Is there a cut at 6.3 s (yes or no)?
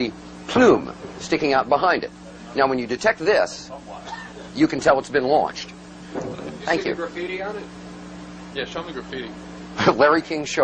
no